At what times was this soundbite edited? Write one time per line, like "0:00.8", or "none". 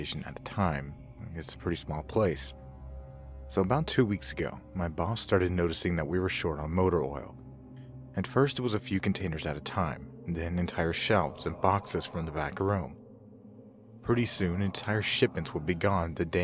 0:05.2